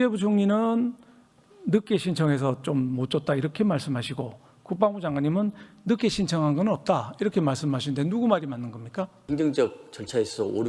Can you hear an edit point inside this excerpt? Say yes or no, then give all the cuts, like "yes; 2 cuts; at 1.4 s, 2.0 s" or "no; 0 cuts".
yes; 1 cut; at 9.2 s